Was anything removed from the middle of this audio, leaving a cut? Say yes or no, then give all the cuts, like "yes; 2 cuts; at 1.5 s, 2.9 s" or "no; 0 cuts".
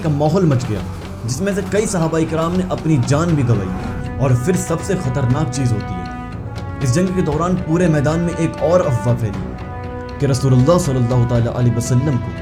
no; 0 cuts